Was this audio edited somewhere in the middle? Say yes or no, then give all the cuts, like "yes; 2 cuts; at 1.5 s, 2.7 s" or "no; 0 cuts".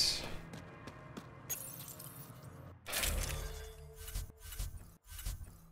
yes; 1 cut; at 2.1 s